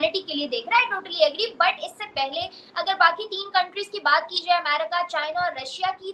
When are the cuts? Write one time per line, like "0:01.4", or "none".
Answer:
none